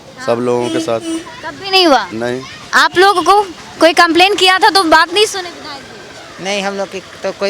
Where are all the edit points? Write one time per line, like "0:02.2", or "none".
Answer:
none

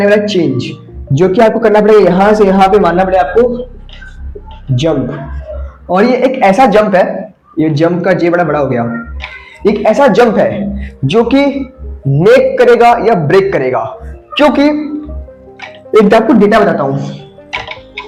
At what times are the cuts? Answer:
none

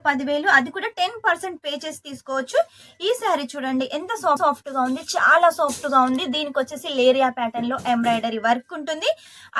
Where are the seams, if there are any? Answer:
none

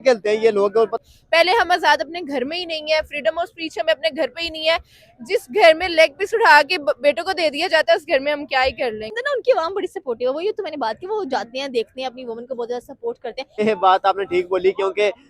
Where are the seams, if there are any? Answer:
0:00.9
0:09.2
0:13.6

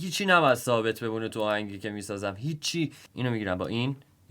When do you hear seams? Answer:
0:03.0

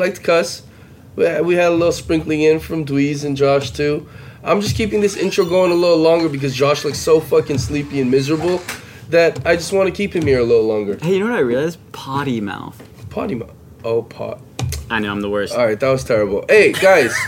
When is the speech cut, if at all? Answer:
none

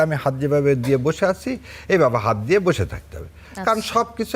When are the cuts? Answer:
none

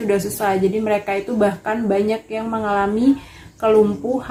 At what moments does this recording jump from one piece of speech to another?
none

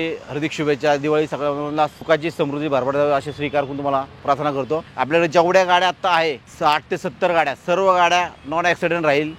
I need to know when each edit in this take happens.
0:02.0
0:04.9
0:06.5

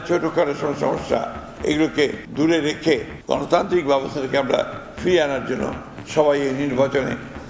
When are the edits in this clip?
none

